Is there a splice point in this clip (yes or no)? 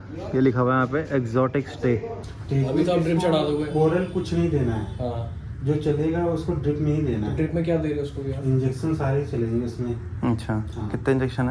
yes